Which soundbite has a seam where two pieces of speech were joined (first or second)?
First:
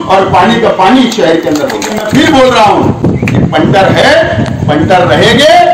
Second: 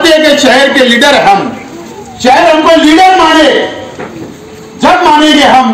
first